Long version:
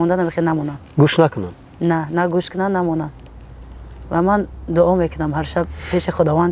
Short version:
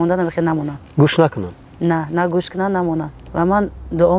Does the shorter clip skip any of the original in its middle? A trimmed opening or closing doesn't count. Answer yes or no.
yes